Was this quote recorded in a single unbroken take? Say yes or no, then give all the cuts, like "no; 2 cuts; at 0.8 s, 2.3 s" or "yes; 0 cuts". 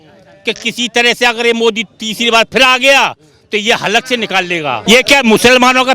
no; 1 cut; at 4.8 s